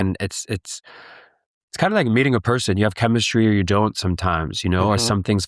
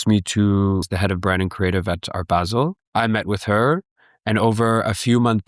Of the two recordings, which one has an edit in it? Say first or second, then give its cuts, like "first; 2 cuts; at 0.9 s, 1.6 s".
second; 2 cuts; at 0.9 s, 2.8 s